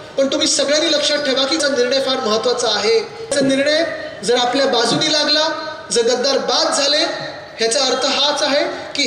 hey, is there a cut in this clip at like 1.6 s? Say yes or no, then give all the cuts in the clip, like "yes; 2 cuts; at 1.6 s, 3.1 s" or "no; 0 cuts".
yes; 2 cuts; at 1.6 s, 3.3 s